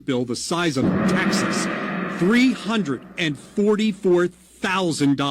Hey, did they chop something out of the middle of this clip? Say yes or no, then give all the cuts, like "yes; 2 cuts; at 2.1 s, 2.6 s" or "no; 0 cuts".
yes; 1 cut; at 4.0 s